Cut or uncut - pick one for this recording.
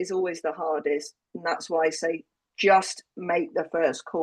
uncut